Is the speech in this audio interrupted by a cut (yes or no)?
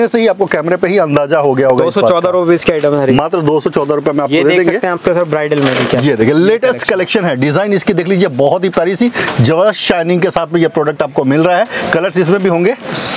no